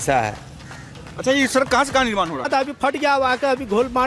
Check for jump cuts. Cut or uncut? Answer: cut